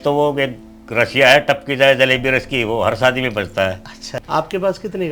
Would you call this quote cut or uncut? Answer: cut